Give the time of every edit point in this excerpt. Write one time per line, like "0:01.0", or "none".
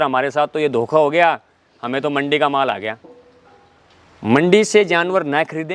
0:03.5